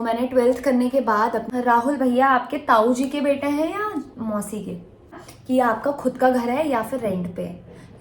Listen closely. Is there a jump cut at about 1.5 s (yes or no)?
yes